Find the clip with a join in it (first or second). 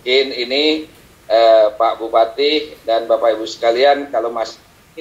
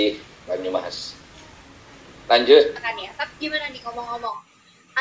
second